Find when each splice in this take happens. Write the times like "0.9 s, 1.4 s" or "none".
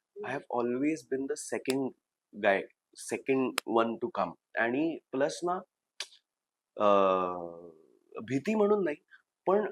none

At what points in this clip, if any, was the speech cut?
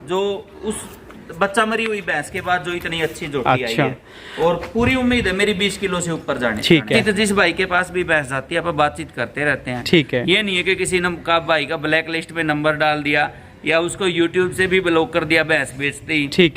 7.0 s

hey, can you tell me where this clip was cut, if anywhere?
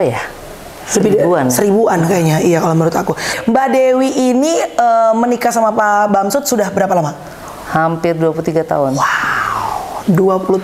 3.3 s

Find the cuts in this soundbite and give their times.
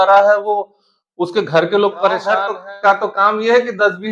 2.4 s

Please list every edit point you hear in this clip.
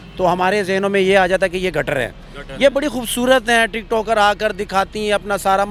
none

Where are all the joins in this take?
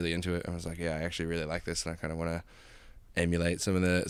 none

